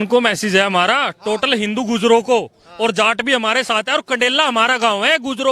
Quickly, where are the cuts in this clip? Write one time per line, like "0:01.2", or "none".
none